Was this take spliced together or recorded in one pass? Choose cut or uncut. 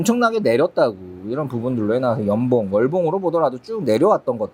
uncut